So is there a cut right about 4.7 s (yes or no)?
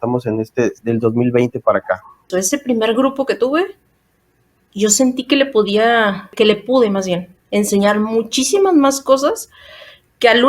no